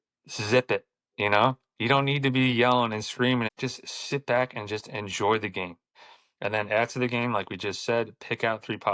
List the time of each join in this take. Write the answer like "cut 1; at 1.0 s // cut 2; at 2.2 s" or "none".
cut 1; at 3.5 s // cut 2; at 5.9 s